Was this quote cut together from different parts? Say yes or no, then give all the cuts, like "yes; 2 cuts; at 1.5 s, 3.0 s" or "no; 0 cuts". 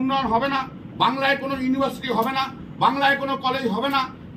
no; 0 cuts